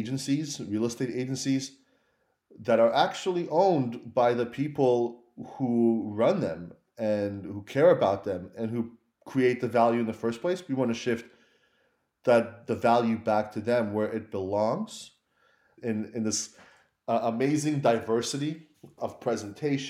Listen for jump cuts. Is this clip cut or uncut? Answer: cut